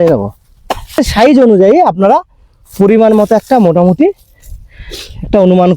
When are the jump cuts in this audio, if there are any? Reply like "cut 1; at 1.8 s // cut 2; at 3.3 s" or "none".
cut 1; at 1.0 s